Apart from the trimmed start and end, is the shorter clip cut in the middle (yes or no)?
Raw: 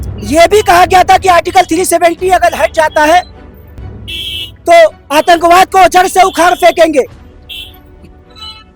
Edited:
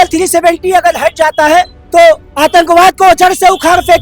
yes